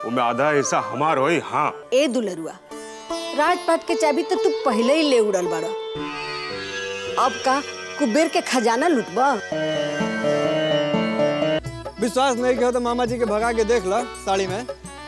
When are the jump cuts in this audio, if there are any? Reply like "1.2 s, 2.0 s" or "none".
1.8 s, 11.6 s